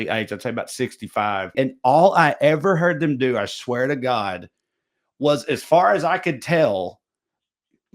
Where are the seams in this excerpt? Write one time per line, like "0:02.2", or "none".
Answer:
0:01.5